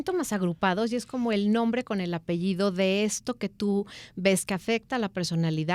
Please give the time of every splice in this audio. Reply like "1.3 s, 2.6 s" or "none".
none

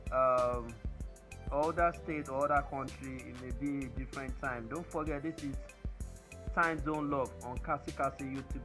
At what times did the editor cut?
none

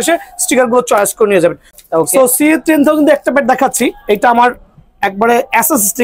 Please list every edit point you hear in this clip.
1.7 s

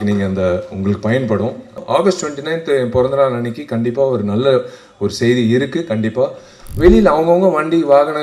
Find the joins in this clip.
1.8 s, 6.6 s

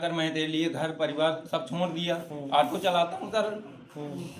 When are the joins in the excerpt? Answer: 2.3 s

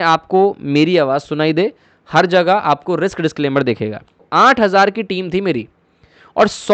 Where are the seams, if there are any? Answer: 4.2 s

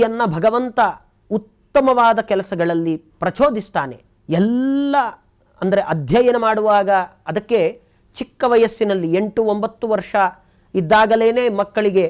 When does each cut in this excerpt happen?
none

